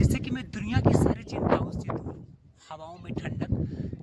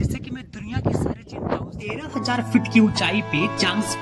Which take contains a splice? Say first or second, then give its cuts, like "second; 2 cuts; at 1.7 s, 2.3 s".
second; 1 cut; at 2.1 s